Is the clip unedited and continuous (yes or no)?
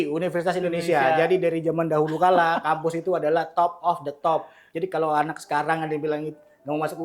yes